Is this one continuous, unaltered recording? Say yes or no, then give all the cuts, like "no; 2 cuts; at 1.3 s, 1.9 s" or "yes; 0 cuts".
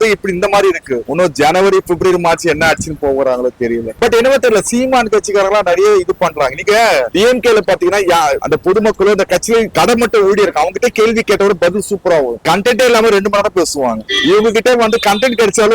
no; 1 cut; at 3.9 s